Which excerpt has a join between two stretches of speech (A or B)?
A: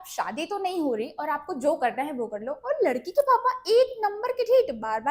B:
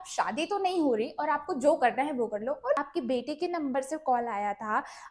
B